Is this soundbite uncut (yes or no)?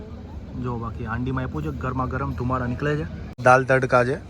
no